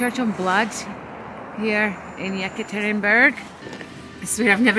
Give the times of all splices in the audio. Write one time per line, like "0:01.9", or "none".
0:03.6